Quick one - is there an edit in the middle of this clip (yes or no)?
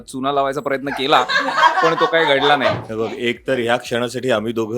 yes